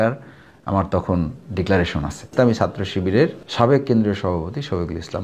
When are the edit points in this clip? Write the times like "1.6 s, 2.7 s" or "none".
2.3 s, 3.4 s